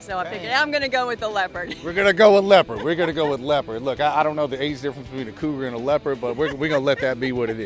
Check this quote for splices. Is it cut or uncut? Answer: uncut